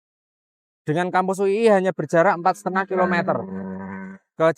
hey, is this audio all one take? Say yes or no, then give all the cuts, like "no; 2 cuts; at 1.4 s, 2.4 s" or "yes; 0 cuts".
yes; 0 cuts